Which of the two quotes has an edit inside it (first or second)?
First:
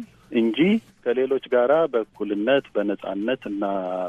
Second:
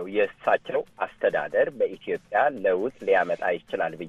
first